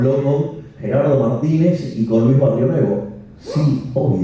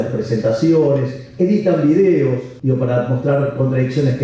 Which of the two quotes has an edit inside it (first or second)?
second